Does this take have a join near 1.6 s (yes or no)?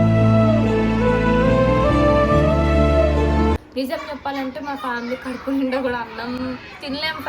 no